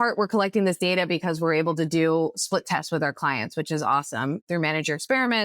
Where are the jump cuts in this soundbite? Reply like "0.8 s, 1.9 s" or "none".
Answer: 4.4 s